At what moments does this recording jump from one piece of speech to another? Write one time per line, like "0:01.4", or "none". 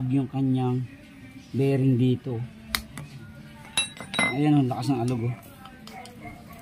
0:04.0